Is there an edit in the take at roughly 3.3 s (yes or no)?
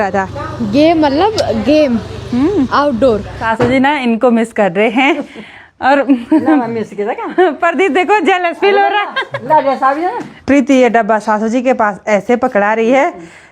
yes